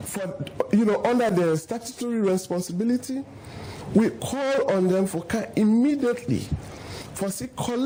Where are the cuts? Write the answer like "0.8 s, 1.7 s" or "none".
none